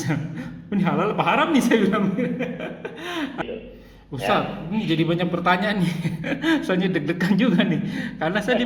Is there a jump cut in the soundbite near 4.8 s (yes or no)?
no